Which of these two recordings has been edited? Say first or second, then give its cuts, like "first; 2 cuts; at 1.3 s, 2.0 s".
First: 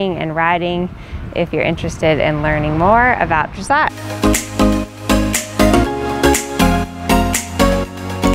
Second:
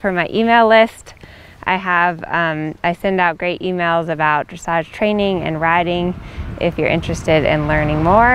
first; 1 cut; at 4.0 s